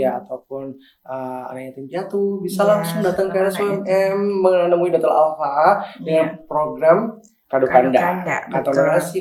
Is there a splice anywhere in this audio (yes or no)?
no